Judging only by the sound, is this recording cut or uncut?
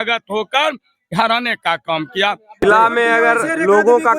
cut